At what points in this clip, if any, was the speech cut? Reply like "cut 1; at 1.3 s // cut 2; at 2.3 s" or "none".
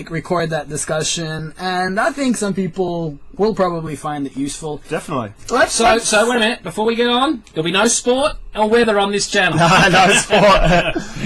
none